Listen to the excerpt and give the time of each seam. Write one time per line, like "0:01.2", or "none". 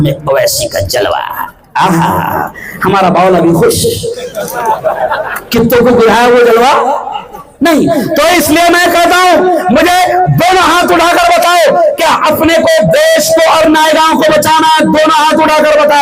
none